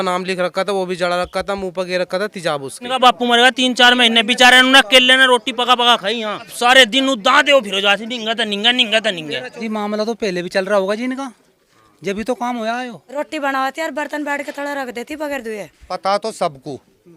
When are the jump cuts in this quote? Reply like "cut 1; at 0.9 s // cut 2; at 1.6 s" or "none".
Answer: cut 1; at 2.9 s // cut 2; at 6.5 s // cut 3; at 9.5 s // cut 4; at 13.1 s // cut 5; at 15.8 s